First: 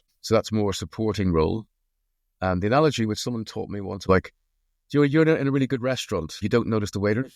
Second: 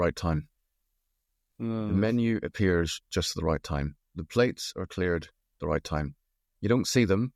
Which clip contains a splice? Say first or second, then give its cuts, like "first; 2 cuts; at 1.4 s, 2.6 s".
first; 2 cuts; at 4.0 s, 6.3 s